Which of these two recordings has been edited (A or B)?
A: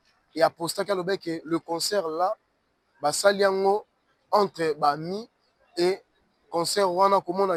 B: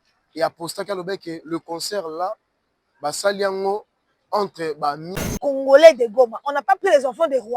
B